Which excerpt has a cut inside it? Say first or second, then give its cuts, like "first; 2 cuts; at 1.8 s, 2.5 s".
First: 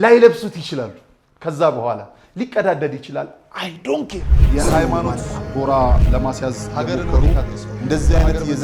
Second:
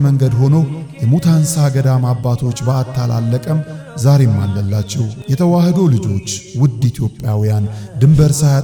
first; 1 cut; at 4.3 s